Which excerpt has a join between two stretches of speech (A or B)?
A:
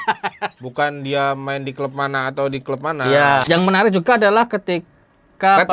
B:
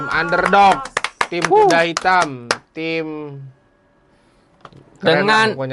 A